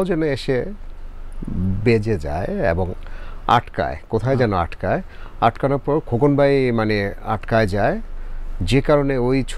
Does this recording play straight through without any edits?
yes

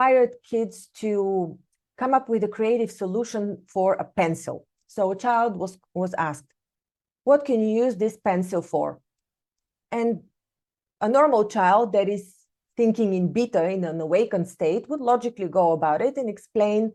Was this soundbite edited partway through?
no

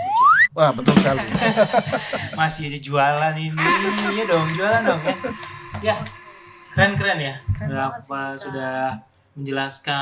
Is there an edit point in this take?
yes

